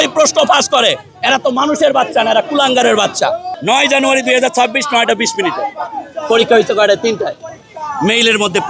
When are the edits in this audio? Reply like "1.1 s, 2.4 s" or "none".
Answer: 3.5 s